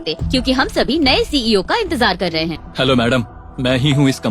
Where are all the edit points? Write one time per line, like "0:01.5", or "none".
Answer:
0:02.6